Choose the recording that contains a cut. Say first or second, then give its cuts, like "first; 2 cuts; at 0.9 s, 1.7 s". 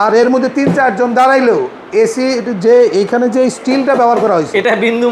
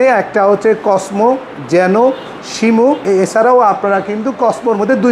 second; 1 cut; at 3.0 s